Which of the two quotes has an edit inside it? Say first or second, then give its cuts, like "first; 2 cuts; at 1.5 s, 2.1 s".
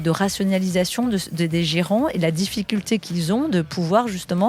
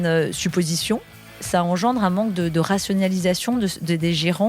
second; 1 cut; at 1.4 s